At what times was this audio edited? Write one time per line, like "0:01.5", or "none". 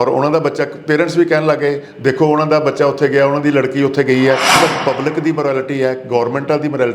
0:04.6